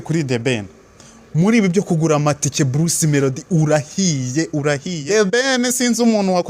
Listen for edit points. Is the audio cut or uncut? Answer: cut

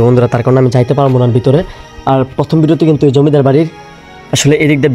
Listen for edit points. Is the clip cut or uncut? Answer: uncut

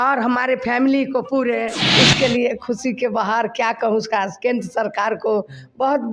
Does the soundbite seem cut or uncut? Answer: cut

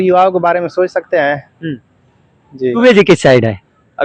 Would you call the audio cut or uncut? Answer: cut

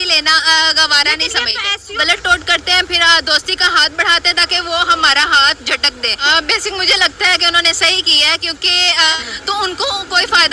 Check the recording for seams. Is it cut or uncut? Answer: cut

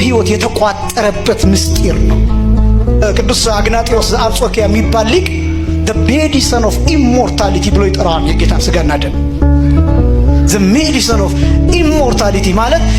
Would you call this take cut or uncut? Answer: uncut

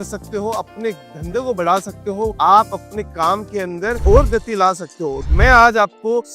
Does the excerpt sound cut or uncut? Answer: cut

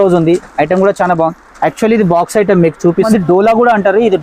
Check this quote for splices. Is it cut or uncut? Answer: cut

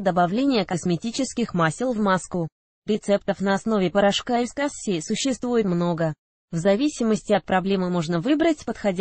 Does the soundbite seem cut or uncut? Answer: cut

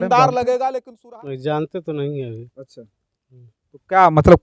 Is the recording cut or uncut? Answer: cut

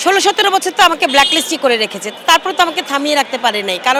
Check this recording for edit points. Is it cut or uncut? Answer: uncut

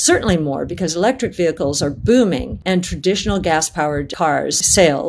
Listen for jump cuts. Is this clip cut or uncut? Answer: cut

